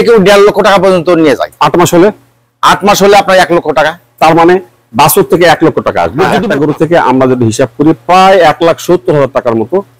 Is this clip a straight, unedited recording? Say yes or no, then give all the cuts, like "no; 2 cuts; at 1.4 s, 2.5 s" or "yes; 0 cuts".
no; 1 cut; at 6.4 s